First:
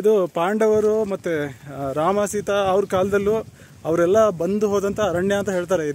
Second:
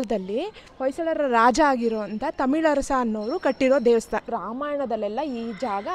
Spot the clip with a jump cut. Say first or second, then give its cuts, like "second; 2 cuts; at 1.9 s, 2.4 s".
second; 1 cut; at 4.3 s